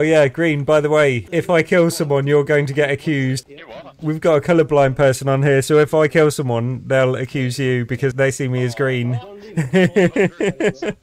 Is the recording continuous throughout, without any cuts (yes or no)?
yes